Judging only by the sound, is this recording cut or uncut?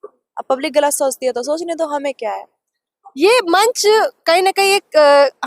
uncut